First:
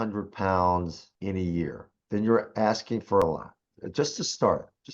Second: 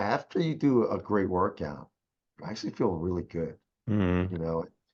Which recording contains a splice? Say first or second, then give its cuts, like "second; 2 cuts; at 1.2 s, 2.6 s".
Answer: first; 3 cuts; at 1.1 s, 1.9 s, 3.2 s